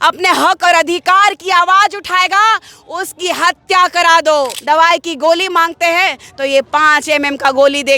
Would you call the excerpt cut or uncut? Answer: cut